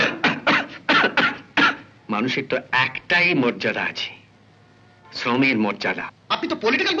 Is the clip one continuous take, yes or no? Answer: no